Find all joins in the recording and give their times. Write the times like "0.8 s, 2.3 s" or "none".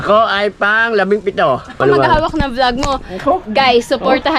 1.7 s